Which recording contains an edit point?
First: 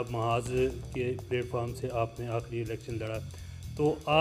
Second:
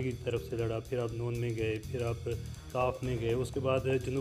second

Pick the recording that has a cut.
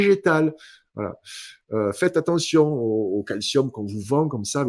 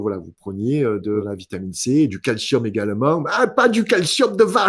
second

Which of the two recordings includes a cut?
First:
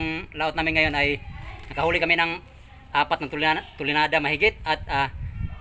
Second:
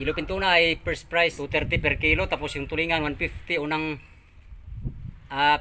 second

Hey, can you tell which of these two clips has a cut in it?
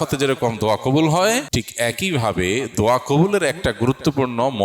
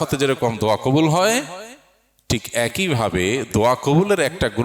first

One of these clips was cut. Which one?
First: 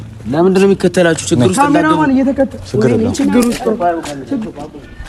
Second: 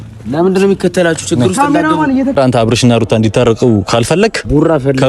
second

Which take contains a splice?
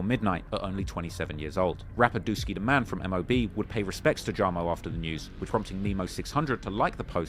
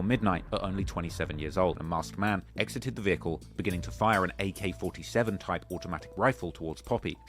second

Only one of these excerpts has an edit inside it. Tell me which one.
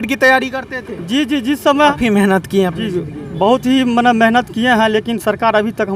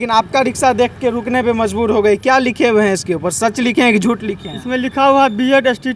first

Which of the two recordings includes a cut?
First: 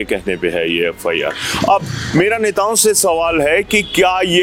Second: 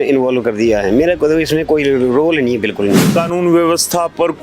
second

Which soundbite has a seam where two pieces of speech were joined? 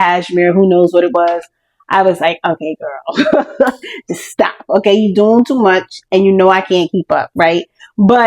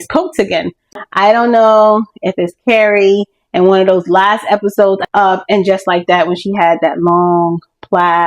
second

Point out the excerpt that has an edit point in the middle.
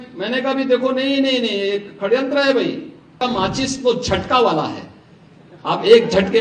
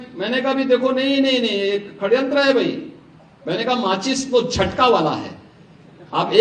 first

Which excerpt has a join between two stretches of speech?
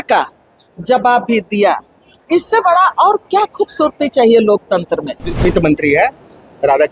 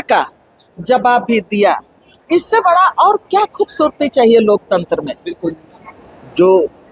first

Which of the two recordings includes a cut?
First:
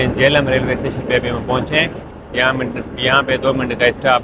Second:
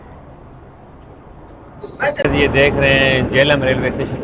second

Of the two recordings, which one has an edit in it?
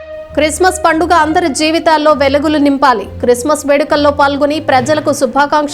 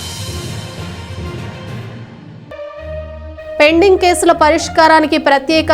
second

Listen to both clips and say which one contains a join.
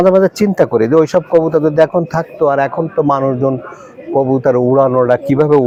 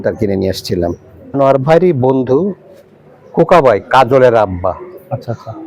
second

